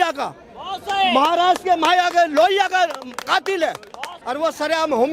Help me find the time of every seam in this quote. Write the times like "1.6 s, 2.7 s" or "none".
4.2 s